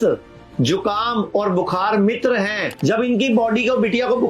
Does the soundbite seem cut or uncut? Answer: cut